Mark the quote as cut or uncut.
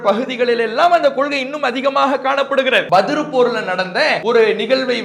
cut